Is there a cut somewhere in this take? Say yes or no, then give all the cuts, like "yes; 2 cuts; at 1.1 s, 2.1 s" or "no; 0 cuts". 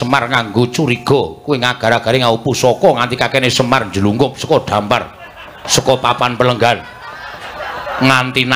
no; 0 cuts